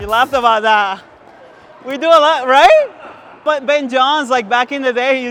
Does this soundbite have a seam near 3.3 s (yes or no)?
no